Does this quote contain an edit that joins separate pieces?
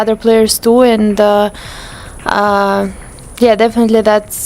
no; 0 cuts

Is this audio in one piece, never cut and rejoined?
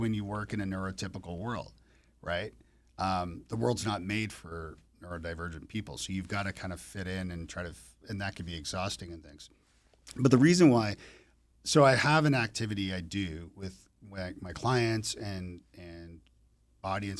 yes; 0 cuts

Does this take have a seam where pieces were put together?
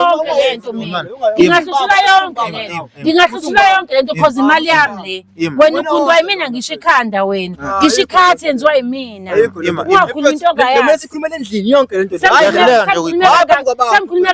no; 0 cuts

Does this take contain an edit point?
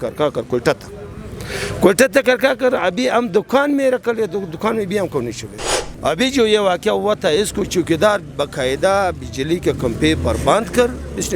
yes; 1 cut; at 5.8 s

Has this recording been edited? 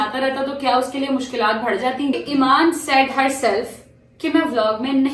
yes; 1 cut; at 2.2 s

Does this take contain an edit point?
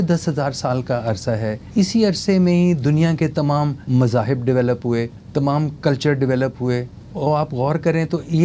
yes; 4 cuts; at 1.6 s, 3.8 s, 5.2 s, 7.0 s

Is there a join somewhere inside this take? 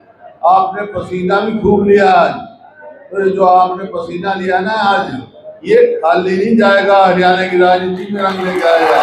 no; 0 cuts

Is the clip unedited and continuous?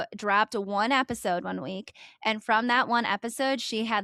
yes; 0 cuts

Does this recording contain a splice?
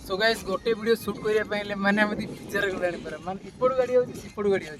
no; 0 cuts

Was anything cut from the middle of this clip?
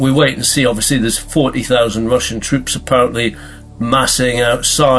no; 0 cuts

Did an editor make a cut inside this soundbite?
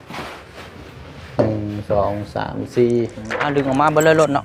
yes; 1 cut; at 3.3 s

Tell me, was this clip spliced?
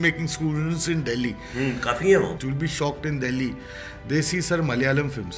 yes; 1 cut; at 2.4 s

